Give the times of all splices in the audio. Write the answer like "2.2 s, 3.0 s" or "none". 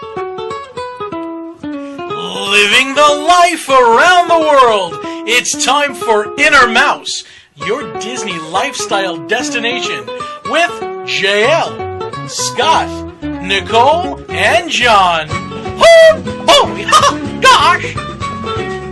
none